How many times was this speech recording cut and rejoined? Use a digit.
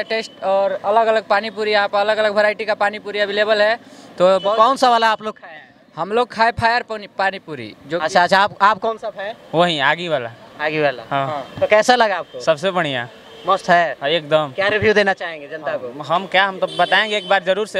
0